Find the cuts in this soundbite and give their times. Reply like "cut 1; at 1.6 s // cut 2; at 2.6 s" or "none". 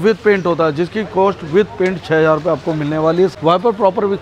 cut 1; at 3.3 s